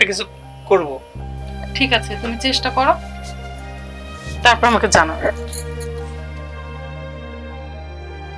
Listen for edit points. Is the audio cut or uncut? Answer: cut